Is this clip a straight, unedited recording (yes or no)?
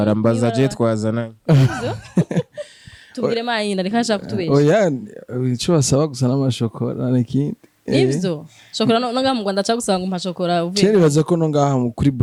yes